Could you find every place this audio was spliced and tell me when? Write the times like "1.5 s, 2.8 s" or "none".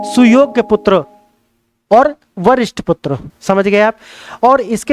3.3 s